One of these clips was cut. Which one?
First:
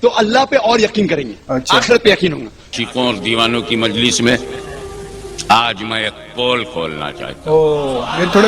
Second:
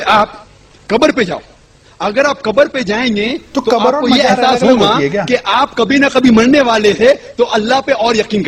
first; 1 cut; at 2.7 s

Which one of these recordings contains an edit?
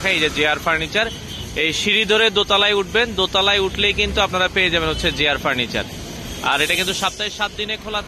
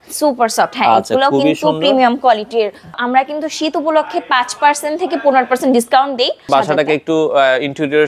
second; 2 cuts; at 3.0 s, 6.5 s

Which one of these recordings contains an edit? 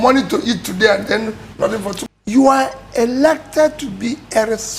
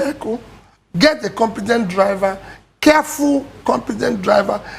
first; 1 cut; at 1.9 s

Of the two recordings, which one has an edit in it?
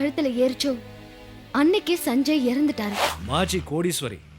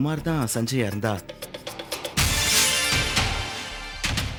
first; 1 cut; at 3.1 s

